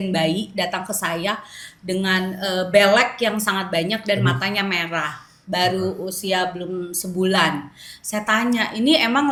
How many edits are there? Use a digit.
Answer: 0